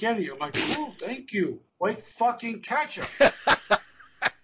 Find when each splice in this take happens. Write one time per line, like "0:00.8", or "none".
0:03.0